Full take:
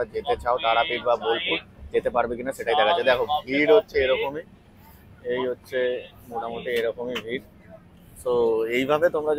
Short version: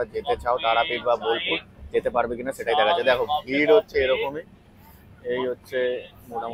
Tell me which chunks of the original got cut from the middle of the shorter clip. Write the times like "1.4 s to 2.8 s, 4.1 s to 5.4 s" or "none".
none